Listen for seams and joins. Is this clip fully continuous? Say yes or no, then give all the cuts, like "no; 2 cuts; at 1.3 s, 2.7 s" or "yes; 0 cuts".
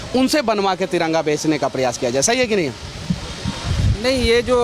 yes; 0 cuts